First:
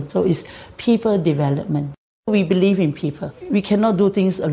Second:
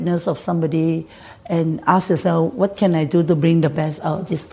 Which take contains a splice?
first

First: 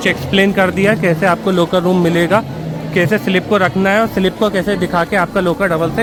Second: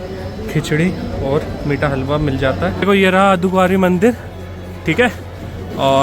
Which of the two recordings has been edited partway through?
second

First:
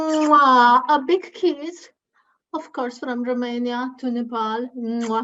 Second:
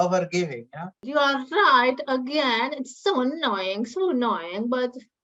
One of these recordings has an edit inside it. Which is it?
second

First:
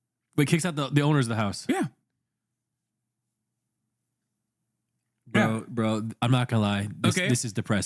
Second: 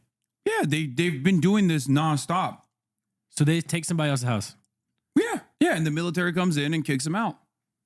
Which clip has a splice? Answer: second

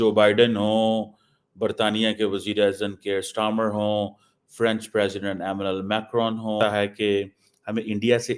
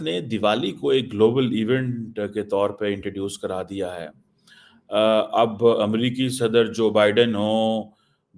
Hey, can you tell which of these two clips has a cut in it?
first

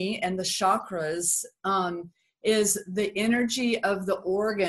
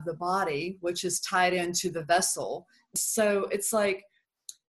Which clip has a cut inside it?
second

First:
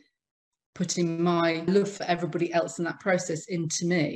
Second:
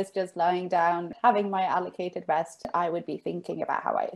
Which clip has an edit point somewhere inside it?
second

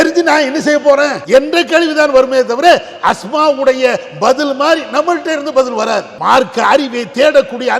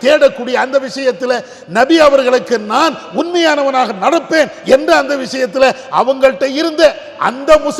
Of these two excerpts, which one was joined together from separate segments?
first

